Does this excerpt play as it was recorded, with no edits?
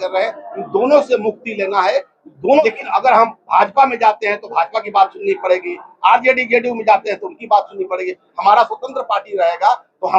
no; 1 cut; at 2.6 s

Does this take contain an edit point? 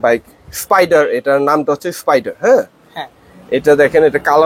no; 0 cuts

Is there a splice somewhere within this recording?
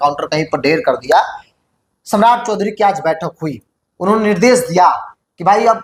no; 0 cuts

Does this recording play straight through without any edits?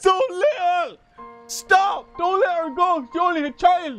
yes; 0 cuts

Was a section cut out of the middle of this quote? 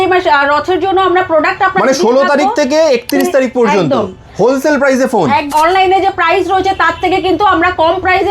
yes; 1 cut; at 5.5 s

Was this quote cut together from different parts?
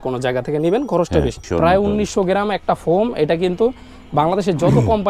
yes; 1 cut; at 1.4 s

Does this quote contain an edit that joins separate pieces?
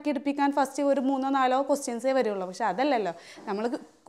no; 0 cuts

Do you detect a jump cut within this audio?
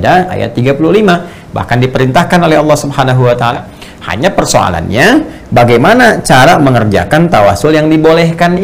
yes; 1 cut; at 3.5 s

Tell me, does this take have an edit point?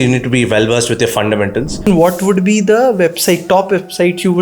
yes; 1 cut; at 2.0 s

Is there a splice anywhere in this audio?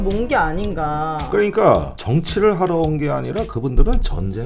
no; 0 cuts

